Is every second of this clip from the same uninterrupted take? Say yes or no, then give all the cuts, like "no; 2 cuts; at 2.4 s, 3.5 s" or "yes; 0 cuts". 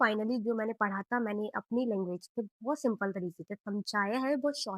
yes; 0 cuts